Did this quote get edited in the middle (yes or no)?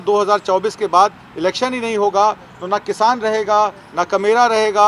no